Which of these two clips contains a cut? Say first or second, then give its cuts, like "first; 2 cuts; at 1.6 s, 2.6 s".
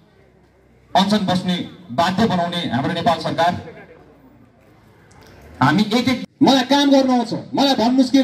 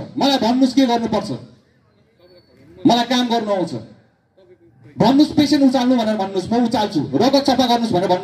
first; 1 cut; at 6.2 s